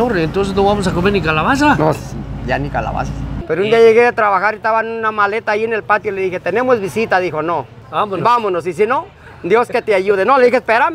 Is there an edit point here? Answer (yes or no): yes